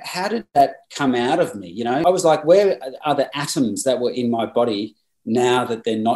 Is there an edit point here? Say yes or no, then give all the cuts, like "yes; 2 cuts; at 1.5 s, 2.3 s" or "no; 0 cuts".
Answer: yes; 1 cut; at 2.0 s